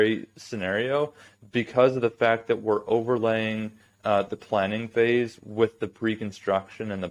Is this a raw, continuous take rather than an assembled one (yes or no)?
yes